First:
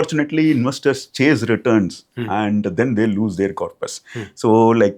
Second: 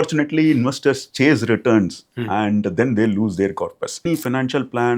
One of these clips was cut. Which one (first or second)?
second